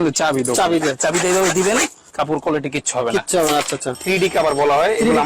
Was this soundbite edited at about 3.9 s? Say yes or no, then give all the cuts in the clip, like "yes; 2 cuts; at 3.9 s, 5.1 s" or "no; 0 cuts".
yes; 1 cut; at 3.9 s